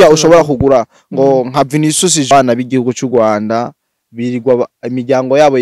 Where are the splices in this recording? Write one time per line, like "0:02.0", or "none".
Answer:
0:02.3

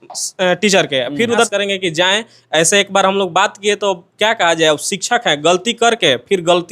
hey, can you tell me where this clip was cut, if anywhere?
0:01.5

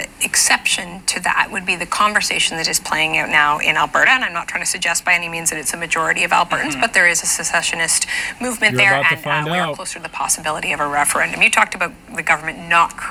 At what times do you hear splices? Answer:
none

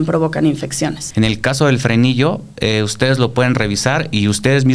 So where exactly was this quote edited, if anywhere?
0:01.0

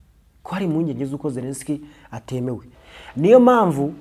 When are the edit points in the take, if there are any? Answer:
0:02.7

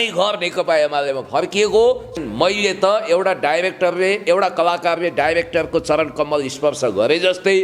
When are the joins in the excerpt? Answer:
0:02.2

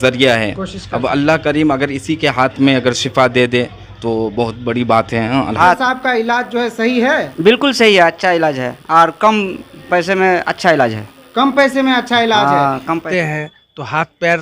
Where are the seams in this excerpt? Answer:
0:05.6
0:13.0

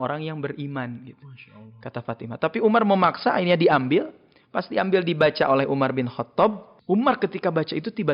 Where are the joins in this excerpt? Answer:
0:06.7

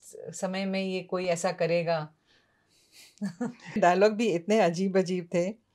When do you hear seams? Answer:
0:03.8

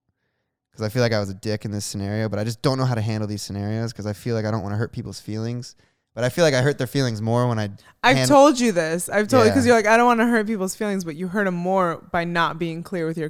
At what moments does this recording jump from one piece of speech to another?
none

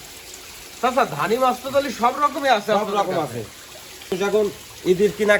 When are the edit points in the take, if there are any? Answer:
0:04.2

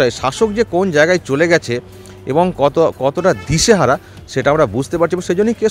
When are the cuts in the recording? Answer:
none

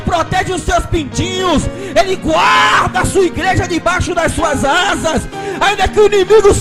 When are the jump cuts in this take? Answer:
none

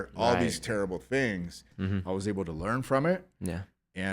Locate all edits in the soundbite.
0:01.7

